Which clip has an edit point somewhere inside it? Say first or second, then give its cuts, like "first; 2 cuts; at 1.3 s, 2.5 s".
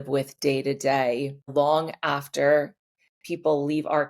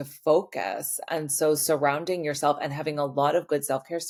first; 1 cut; at 1.5 s